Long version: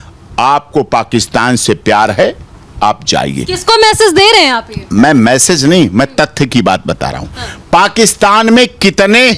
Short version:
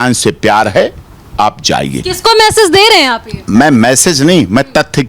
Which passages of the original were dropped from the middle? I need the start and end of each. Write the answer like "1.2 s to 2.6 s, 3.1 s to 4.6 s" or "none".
none